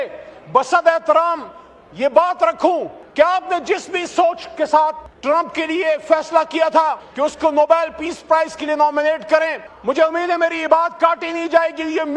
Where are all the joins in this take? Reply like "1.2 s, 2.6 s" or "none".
3.0 s, 5.1 s, 7.0 s, 9.7 s